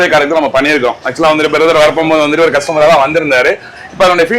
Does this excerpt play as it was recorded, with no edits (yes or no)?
yes